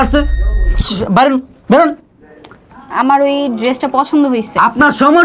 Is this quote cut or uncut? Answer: uncut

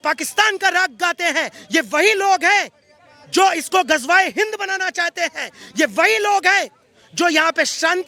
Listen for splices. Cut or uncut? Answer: uncut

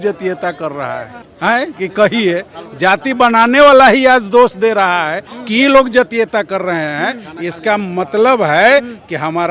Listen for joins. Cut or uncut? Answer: uncut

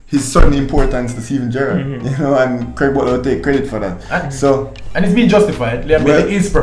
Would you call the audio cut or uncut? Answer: uncut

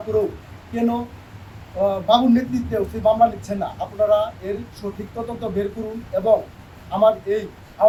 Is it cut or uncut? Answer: uncut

